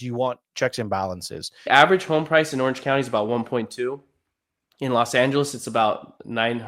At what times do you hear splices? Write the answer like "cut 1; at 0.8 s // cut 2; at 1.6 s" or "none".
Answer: cut 1; at 1.7 s